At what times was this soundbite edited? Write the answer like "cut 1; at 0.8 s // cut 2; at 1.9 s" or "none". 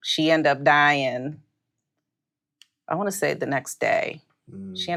none